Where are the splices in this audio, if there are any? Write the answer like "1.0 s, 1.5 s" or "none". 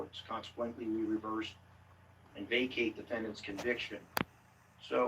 none